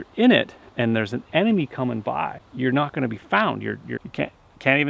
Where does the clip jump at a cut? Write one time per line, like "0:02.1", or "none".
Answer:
0:02.4
0:04.0